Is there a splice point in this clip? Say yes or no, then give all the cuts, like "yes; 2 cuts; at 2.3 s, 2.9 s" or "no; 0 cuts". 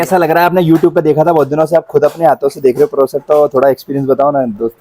no; 0 cuts